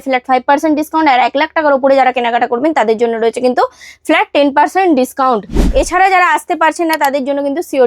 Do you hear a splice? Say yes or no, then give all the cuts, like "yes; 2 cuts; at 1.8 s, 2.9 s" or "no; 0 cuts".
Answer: yes; 1 cut; at 5.6 s